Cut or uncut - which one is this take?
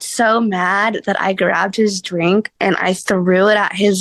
cut